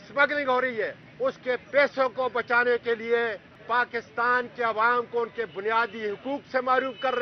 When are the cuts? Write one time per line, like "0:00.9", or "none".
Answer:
0:01.0
0:03.5